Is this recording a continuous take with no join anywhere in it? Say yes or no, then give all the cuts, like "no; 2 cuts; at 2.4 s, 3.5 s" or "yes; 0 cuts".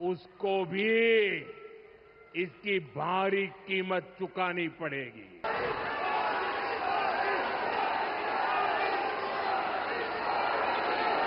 no; 1 cut; at 5.4 s